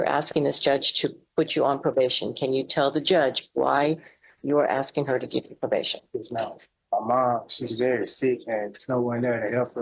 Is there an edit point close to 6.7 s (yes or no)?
yes